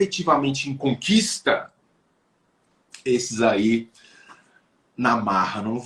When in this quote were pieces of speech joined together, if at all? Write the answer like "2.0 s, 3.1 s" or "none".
none